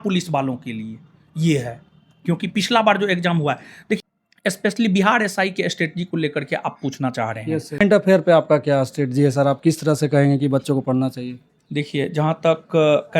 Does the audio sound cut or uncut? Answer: cut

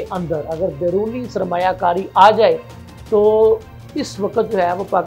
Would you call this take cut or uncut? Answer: uncut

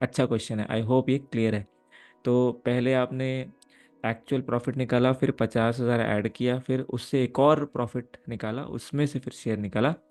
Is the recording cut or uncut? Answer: uncut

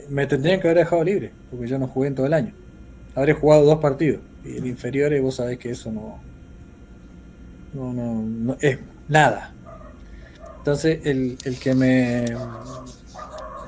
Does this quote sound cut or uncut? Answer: uncut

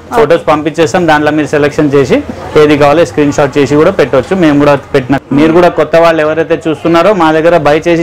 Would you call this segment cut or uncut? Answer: cut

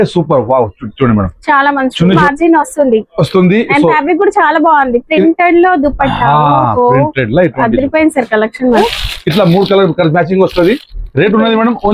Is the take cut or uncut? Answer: cut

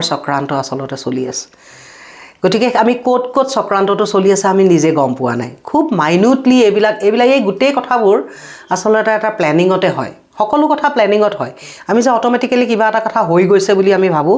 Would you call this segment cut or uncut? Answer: uncut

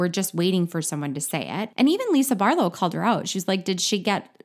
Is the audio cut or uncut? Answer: cut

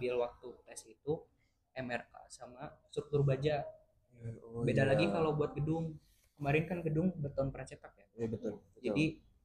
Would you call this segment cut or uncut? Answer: uncut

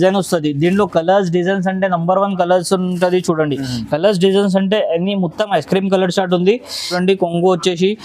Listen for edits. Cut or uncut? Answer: cut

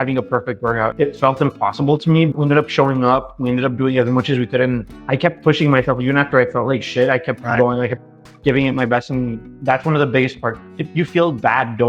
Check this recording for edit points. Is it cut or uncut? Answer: cut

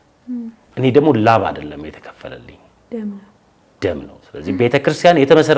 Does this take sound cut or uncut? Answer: uncut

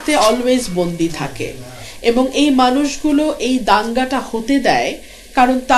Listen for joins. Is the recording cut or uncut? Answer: uncut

